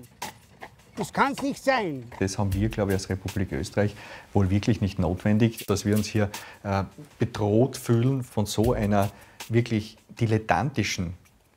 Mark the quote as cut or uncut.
cut